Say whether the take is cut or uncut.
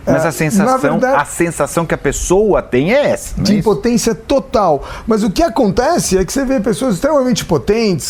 uncut